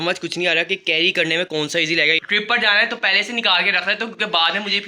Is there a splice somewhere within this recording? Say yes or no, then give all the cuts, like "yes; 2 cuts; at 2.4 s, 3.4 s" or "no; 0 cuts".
yes; 1 cut; at 2.2 s